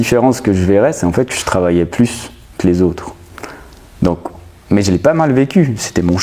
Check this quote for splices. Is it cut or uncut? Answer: uncut